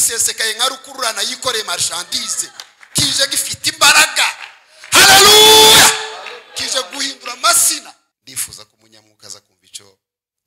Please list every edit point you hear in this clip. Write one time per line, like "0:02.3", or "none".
0:08.1